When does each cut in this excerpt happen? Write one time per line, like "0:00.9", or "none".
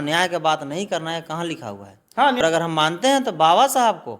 0:02.4